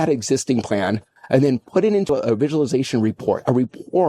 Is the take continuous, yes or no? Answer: no